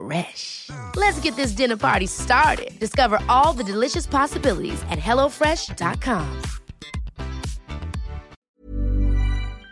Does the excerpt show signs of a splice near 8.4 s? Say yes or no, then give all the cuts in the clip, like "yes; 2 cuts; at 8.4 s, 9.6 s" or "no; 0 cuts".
yes; 1 cut; at 8.4 s